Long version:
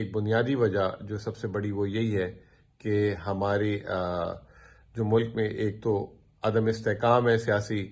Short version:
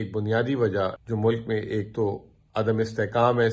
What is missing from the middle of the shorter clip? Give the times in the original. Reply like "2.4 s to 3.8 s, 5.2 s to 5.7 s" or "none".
1.0 s to 4.9 s